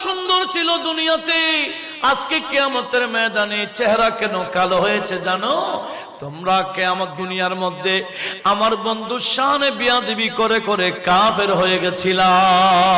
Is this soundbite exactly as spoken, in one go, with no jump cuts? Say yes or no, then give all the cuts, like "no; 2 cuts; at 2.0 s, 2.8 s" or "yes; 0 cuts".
yes; 0 cuts